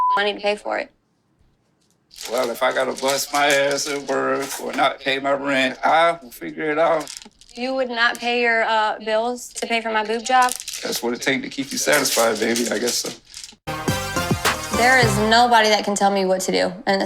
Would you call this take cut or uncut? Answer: cut